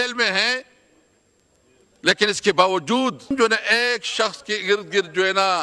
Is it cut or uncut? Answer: cut